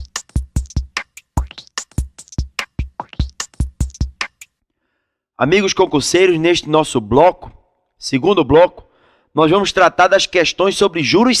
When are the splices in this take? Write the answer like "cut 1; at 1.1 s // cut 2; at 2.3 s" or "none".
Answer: cut 1; at 1.2 s // cut 2; at 4.4 s